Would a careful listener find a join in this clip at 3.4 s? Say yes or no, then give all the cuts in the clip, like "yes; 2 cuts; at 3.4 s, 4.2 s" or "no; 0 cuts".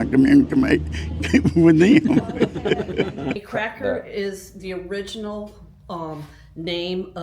yes; 1 cut; at 3.4 s